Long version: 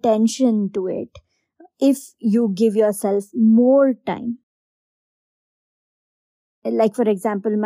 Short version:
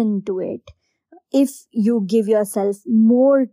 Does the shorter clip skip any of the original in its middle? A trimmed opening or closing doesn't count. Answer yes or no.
no